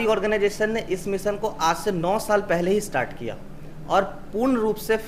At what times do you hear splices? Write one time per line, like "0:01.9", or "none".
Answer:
none